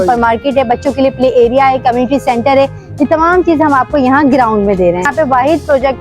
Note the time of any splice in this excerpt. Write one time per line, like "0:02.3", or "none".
0:05.1

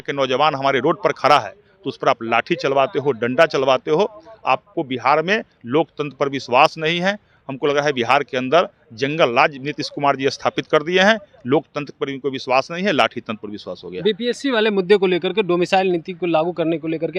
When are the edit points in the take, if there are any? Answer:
none

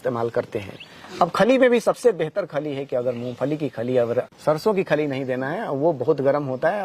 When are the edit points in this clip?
0:04.3

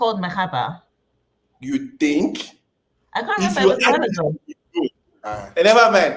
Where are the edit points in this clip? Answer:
none

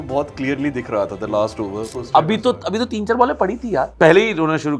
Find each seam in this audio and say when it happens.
0:02.0
0:03.9

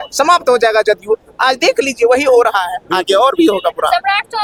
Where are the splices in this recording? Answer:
none

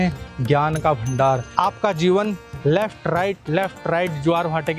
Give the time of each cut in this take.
0:01.5

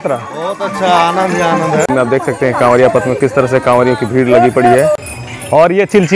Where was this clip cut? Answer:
0:01.9
0:05.0

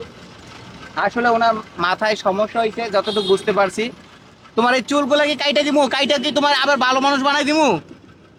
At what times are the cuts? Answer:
none

